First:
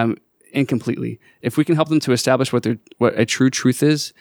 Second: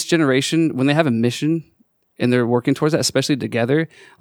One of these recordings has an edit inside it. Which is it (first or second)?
first